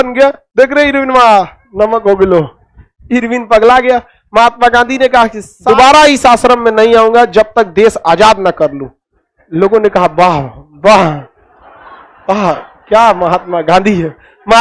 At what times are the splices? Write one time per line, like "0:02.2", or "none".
0:05.5